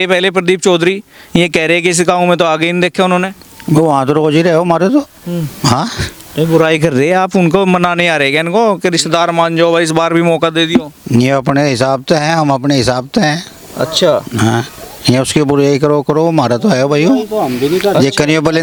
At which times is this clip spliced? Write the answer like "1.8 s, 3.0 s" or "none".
none